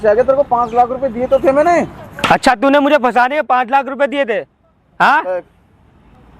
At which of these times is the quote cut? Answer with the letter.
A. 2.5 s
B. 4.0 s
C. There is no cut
C